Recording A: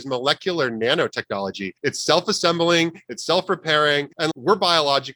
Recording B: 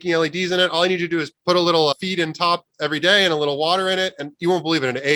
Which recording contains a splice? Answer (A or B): A